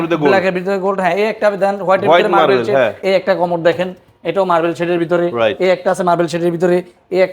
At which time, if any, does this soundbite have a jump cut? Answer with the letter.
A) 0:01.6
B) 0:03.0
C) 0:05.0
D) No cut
B